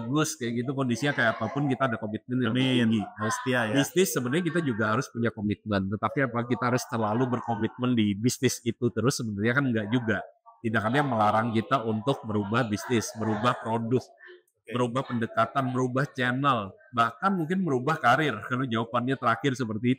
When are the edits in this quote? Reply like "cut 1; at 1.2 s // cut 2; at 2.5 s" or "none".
none